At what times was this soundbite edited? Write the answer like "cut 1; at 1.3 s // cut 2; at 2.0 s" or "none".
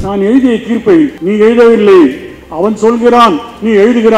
cut 1; at 1.2 s

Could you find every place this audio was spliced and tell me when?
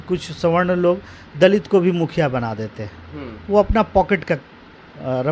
none

